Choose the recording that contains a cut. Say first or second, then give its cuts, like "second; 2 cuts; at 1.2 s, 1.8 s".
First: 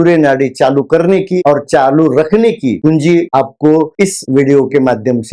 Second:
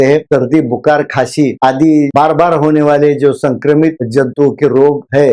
first; 1 cut; at 4.2 s